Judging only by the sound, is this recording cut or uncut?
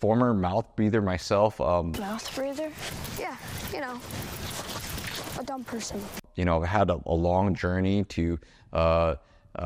uncut